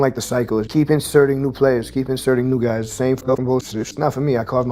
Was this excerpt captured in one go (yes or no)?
yes